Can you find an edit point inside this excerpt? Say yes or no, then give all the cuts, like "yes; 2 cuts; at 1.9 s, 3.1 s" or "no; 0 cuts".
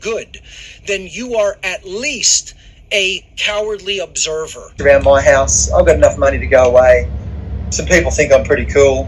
yes; 1 cut; at 4.7 s